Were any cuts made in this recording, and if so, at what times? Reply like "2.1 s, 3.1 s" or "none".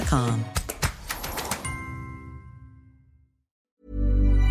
3.6 s